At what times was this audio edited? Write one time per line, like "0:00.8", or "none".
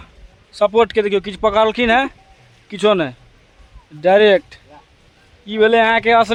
none